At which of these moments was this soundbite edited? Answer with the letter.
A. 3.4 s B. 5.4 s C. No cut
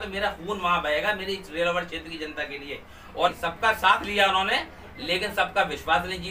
A